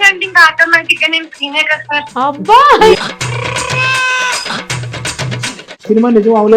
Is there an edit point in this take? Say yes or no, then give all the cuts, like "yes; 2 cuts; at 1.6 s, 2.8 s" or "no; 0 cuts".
yes; 3 cuts; at 2.1 s, 3.0 s, 5.8 s